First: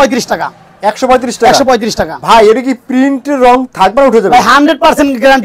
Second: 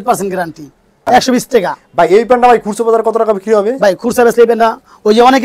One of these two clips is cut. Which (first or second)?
second